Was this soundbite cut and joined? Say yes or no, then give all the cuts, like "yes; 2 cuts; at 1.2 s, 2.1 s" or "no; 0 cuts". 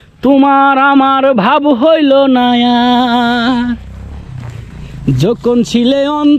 no; 0 cuts